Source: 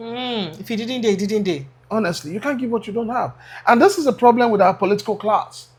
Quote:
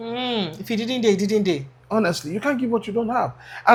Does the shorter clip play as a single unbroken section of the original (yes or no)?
yes